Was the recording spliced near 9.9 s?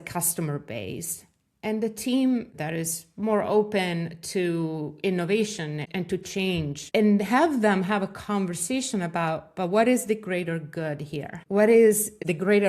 no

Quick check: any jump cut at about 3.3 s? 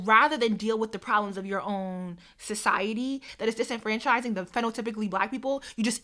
yes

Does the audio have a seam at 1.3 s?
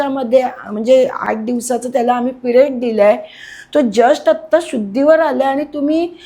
yes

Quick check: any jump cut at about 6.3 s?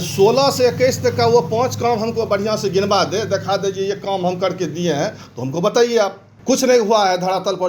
yes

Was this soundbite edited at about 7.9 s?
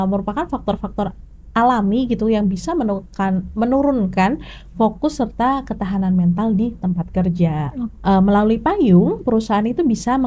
yes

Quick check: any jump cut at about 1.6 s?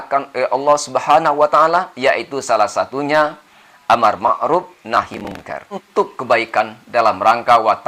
no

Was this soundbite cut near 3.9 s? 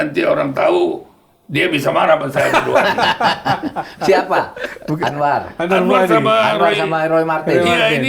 no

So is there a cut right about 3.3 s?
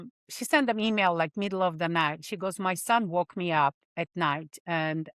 no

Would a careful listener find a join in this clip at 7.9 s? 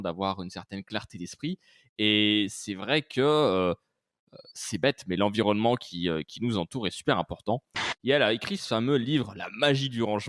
yes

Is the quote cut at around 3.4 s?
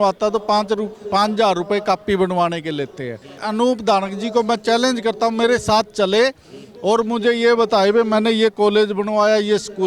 yes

